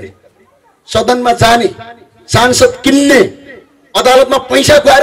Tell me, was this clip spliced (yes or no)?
no